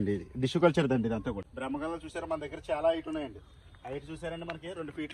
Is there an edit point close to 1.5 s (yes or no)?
yes